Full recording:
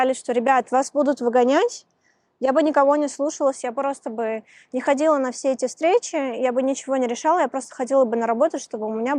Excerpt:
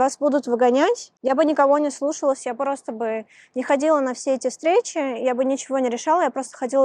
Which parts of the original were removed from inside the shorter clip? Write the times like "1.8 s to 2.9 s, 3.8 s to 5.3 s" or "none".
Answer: 1.8 s to 2.3 s